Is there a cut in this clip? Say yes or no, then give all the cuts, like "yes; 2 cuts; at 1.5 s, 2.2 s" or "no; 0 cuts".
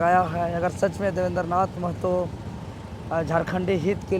no; 0 cuts